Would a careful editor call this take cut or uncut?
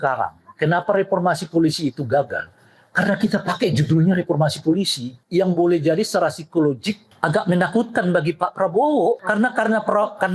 cut